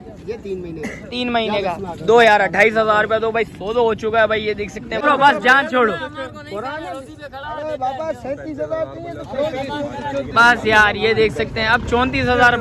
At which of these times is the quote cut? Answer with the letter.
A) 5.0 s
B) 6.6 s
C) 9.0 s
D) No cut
A